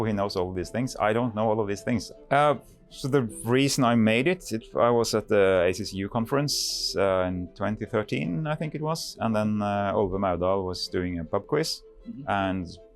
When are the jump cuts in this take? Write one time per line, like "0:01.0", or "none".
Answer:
0:02.1